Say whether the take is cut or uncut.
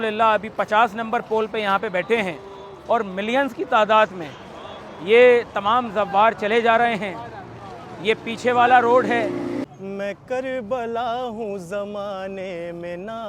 cut